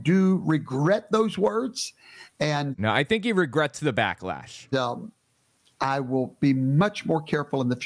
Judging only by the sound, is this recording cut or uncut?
uncut